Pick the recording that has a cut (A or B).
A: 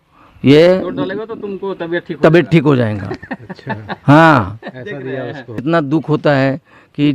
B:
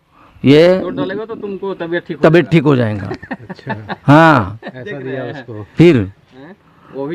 A